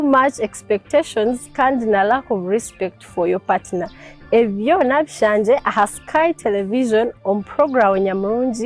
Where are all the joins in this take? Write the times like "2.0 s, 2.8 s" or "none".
none